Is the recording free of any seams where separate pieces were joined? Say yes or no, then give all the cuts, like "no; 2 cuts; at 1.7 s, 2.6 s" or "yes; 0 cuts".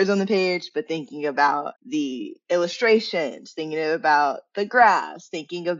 no; 1 cut; at 1.8 s